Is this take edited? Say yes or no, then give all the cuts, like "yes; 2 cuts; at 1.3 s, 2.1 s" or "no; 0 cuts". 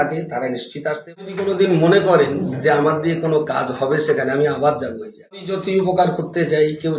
yes; 2 cuts; at 1.2 s, 5.6 s